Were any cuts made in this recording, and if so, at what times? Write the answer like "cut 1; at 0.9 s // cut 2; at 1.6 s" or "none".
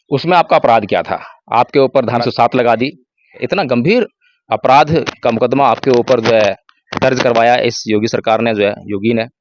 cut 1; at 2.2 s // cut 2; at 3.4 s